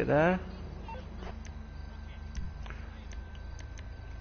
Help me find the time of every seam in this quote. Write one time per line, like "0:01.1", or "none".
0:03.1